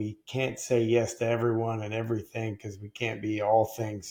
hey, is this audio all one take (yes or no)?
yes